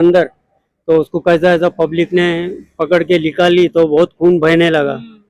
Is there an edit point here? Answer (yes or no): no